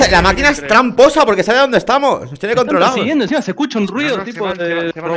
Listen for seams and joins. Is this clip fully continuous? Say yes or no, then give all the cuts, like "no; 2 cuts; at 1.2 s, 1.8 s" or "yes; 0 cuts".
no; 1 cut; at 3.0 s